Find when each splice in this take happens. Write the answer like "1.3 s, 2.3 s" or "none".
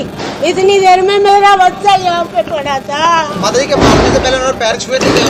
none